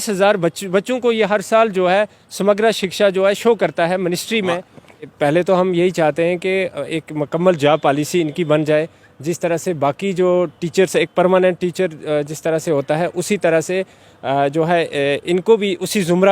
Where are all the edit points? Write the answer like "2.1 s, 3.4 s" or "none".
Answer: 5.1 s